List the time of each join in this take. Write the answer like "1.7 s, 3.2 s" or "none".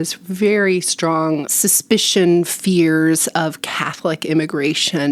1.5 s